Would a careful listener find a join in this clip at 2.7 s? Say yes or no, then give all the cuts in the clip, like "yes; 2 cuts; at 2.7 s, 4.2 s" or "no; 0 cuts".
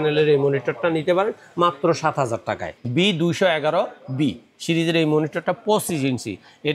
yes; 1 cut; at 2.7 s